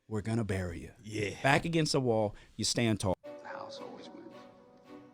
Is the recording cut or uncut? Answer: cut